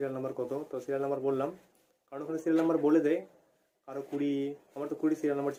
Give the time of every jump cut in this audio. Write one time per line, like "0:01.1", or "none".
none